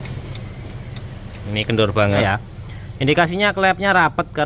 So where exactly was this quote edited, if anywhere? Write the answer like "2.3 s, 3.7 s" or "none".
2.2 s